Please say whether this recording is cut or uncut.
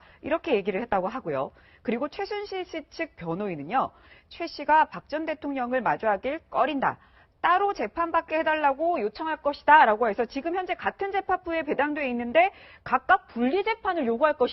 cut